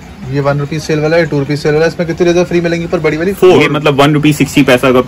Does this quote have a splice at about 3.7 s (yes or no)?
yes